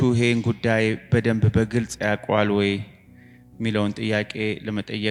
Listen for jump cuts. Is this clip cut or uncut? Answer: uncut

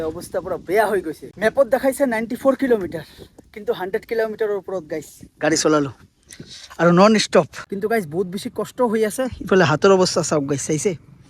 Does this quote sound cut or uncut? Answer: cut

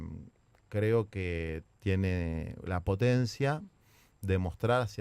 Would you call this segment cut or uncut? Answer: cut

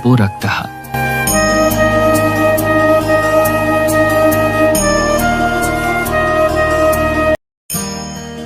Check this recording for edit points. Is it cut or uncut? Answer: cut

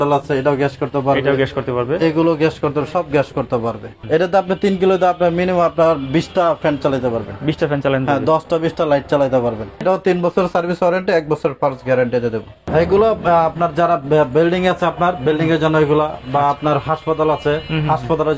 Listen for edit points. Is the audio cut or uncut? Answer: cut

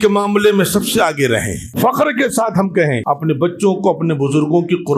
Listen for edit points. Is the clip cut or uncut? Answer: cut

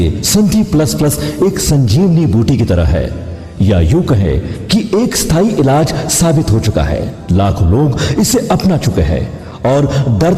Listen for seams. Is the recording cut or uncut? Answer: uncut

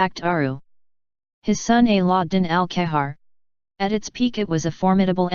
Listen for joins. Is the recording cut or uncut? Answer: uncut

